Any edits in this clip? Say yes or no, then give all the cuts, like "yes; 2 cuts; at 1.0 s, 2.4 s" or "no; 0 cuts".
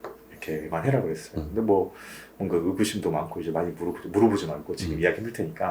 no; 0 cuts